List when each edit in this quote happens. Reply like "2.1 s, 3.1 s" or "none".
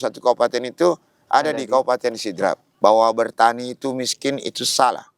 2.7 s